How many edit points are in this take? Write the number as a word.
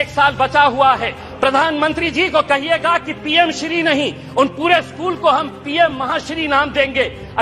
one